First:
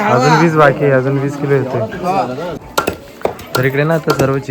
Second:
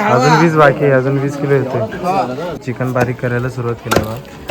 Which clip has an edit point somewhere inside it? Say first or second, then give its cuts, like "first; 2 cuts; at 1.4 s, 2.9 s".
second; 1 cut; at 2.7 s